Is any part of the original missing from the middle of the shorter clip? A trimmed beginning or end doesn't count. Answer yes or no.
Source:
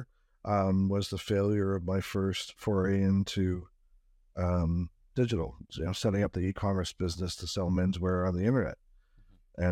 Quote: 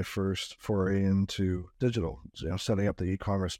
yes